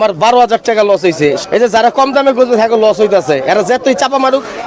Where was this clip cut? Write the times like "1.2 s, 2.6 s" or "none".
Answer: 1.4 s